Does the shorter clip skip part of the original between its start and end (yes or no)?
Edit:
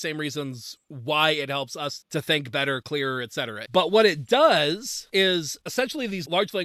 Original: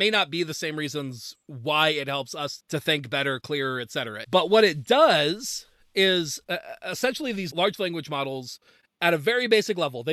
yes